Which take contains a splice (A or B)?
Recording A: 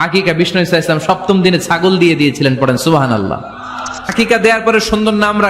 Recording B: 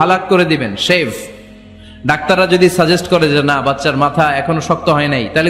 A